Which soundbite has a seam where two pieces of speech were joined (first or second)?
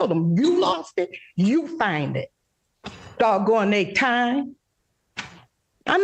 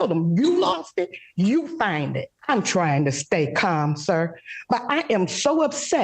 second